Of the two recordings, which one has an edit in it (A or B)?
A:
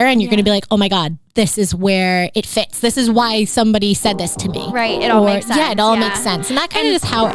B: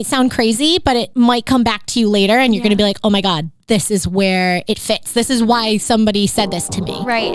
B